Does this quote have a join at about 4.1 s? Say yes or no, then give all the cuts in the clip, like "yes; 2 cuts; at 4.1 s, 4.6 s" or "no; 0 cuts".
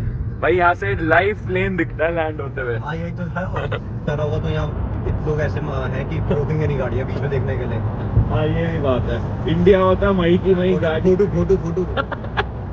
yes; 1 cut; at 4.1 s